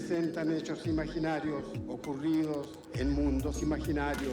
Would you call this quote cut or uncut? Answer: uncut